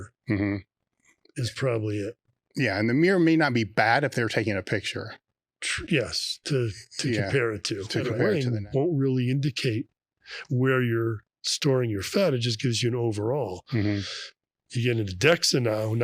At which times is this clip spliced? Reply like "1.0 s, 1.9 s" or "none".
8.2 s